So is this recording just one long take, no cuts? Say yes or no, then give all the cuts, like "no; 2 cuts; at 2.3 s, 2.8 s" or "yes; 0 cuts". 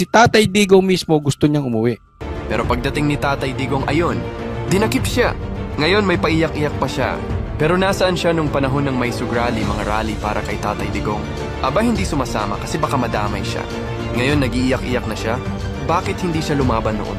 yes; 0 cuts